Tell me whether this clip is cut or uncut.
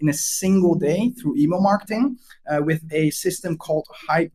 uncut